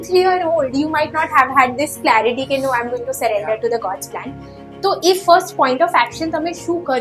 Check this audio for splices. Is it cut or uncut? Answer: uncut